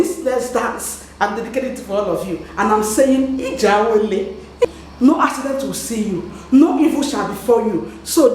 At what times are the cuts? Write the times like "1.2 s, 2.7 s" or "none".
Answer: 4.7 s